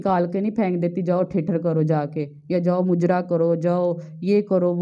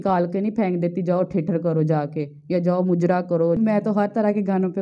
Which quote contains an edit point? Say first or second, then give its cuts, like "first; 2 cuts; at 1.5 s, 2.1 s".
second; 1 cut; at 3.6 s